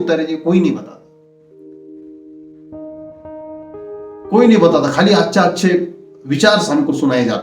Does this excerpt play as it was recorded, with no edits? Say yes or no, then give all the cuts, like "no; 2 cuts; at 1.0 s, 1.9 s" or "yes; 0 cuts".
no; 3 cuts; at 1.0 s, 2.6 s, 4.3 s